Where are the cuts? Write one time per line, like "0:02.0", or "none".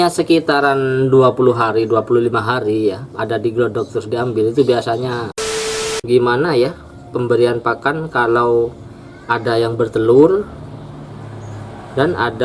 0:05.7